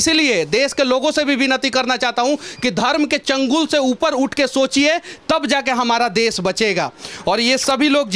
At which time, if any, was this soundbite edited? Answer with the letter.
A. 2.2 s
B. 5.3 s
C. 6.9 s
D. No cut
D